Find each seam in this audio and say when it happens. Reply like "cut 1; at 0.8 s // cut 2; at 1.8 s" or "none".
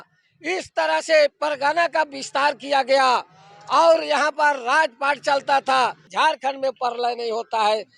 cut 1; at 6.0 s